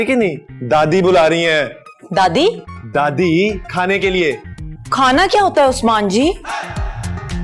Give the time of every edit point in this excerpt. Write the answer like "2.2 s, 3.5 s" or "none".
none